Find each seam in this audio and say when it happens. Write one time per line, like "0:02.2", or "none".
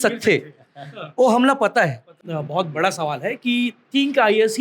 0:02.3